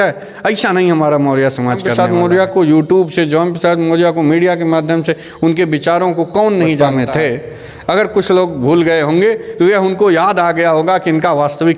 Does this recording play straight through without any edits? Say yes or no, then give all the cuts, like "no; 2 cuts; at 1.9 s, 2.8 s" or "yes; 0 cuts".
no; 2 cuts; at 1.9 s, 6.8 s